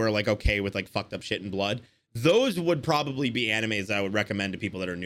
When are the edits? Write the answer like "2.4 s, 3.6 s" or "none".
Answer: none